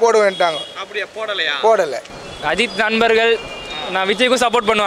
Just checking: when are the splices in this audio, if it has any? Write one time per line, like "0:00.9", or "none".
0:02.1